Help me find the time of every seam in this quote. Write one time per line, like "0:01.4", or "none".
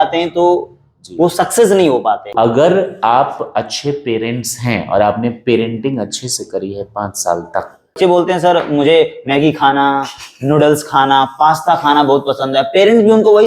0:02.3
0:08.0